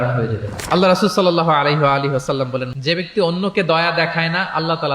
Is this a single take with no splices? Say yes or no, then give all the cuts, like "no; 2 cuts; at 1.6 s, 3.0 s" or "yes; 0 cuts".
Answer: no; 1 cut; at 2.7 s